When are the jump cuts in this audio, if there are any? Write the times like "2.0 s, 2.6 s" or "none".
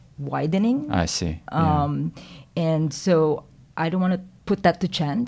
4.3 s